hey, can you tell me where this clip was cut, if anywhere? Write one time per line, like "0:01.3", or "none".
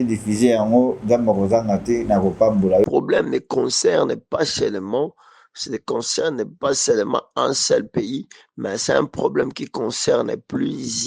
0:02.9